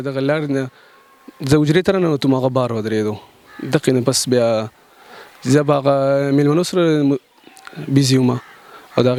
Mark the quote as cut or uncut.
uncut